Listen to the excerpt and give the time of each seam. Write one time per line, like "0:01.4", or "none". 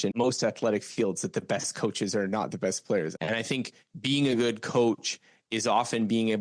0:03.1

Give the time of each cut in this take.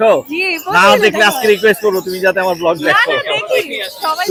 none

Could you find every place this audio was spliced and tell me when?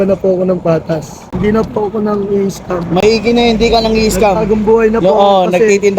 0:01.2

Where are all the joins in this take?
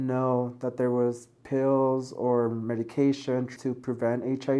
none

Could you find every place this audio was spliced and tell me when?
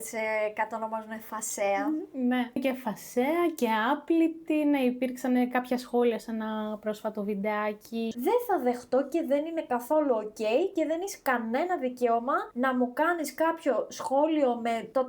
0:02.6
0:08.1

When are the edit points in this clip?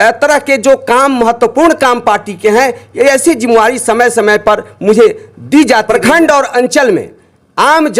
0:05.9

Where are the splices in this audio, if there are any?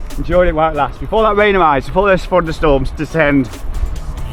none

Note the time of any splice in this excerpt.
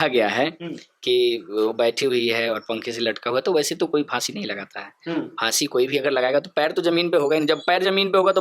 none

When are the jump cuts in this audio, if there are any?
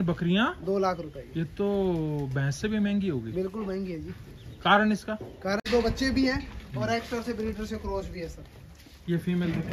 0:05.6

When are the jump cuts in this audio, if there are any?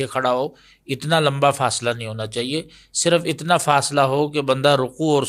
none

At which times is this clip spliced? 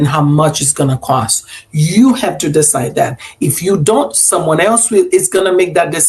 none

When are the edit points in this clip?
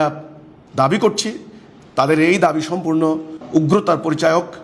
0:03.4

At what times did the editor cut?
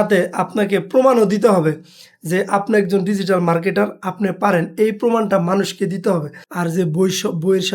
0:06.4

